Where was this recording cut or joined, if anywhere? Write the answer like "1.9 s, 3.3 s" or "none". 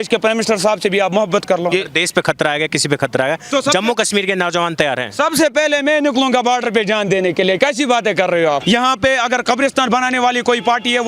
1.7 s, 8.6 s